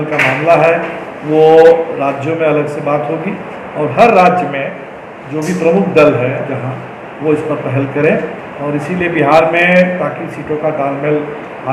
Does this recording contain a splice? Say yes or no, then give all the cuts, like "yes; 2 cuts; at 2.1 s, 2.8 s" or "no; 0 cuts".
no; 0 cuts